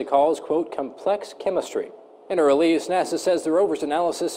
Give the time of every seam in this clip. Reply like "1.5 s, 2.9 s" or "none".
none